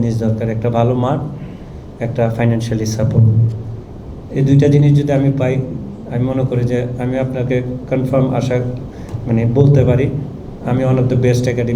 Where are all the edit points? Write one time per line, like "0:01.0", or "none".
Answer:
none